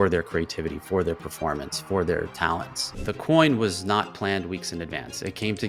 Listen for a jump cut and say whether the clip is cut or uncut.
uncut